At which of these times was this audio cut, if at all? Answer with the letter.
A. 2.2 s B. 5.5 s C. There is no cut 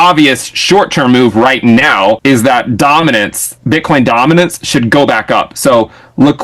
A